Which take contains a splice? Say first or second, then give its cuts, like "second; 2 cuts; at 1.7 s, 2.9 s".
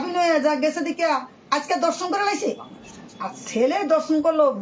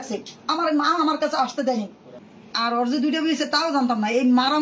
second; 1 cut; at 2.2 s